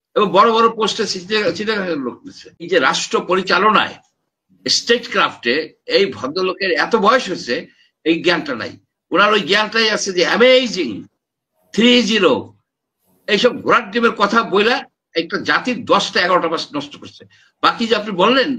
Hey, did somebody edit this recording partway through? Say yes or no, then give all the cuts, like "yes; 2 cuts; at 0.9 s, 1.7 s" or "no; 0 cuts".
yes; 1 cut; at 2.7 s